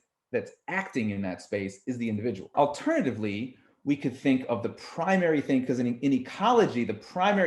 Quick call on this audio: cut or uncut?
cut